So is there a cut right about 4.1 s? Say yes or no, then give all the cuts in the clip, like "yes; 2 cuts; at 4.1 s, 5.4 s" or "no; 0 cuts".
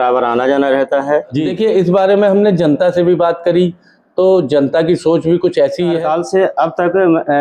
no; 2 cuts; at 1.4 s, 6.0 s